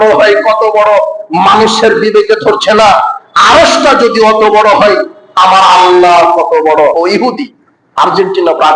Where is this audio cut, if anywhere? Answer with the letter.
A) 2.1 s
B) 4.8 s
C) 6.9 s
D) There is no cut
C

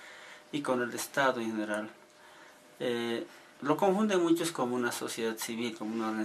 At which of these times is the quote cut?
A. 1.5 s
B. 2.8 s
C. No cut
B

